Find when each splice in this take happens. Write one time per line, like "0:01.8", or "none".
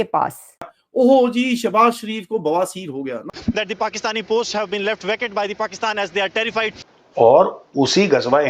0:06.8